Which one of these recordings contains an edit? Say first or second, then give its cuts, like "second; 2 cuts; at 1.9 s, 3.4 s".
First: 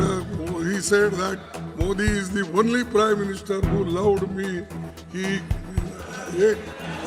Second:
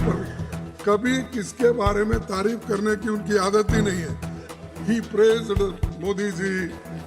second; 1 cut; at 4.5 s